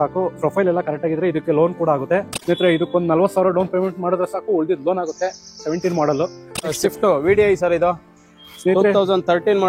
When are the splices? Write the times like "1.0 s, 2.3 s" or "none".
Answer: 2.3 s, 6.7 s